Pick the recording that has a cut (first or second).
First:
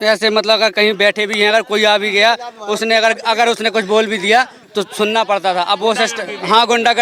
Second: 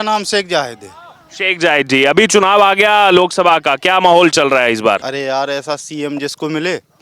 second